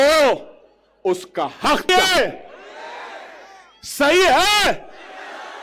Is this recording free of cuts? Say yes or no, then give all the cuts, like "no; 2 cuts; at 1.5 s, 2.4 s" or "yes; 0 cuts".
no; 1 cut; at 1.9 s